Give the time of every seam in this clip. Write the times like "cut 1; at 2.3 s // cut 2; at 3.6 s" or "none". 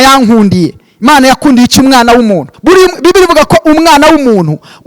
cut 1; at 2.5 s